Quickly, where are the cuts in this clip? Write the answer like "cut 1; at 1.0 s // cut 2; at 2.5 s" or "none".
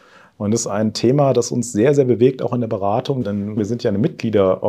cut 1; at 3.6 s